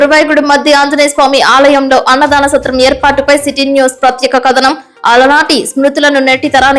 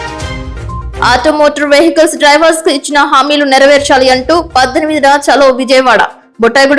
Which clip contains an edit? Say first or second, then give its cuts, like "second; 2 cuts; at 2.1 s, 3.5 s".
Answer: second; 1 cut; at 0.9 s